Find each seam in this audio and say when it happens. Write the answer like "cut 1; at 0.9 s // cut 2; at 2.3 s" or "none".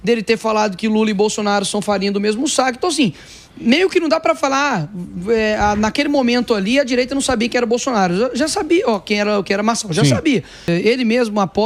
cut 1; at 10.7 s